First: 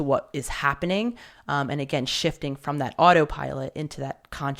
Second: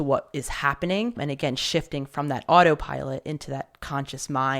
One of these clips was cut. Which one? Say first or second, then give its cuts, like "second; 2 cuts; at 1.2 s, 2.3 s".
second; 1 cut; at 1.2 s